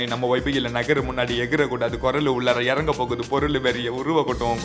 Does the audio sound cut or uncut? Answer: uncut